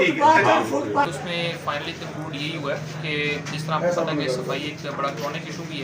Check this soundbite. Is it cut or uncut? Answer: cut